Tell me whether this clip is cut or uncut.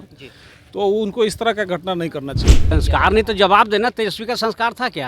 cut